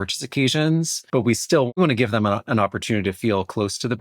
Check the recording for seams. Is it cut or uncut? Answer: cut